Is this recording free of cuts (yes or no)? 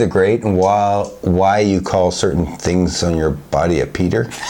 yes